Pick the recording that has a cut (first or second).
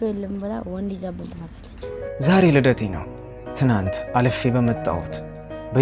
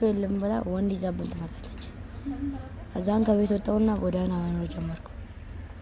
first